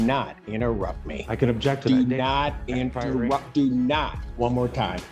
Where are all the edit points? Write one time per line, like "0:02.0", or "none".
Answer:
0:04.2